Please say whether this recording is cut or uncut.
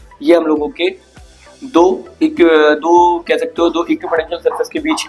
uncut